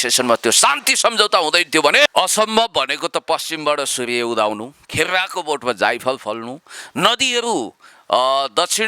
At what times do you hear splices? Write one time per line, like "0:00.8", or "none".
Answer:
0:02.1